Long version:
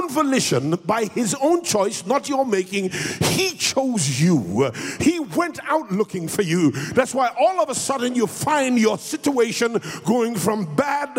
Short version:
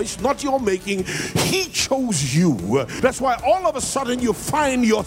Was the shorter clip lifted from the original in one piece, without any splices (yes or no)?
no